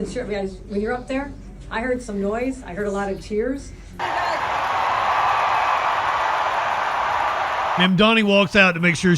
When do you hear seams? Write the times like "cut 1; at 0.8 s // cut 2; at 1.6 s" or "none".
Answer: cut 1; at 4.0 s